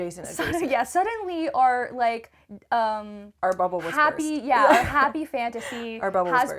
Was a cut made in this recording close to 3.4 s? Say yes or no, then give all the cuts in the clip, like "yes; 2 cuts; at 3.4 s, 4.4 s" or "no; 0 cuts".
no; 0 cuts